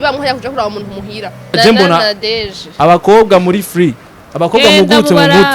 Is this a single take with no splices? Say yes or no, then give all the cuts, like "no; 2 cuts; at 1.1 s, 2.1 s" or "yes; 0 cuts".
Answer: no; 1 cut; at 1.5 s